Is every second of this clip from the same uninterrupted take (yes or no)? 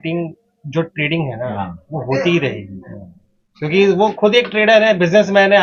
yes